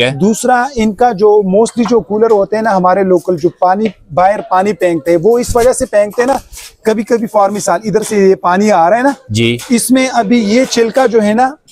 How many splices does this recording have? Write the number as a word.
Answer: zero